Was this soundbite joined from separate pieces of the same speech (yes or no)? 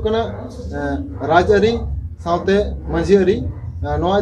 no